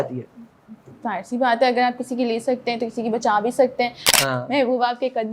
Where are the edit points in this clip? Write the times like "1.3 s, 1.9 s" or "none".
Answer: 4.1 s